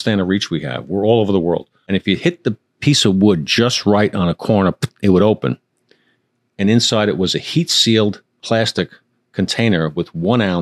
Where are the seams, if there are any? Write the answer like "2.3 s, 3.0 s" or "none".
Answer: 1.7 s, 8.4 s